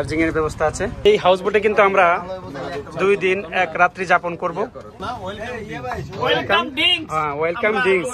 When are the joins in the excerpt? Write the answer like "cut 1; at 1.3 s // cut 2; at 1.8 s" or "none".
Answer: cut 1; at 1.0 s // cut 2; at 5.3 s